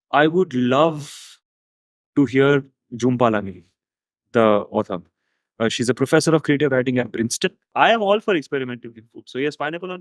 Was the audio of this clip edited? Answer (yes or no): yes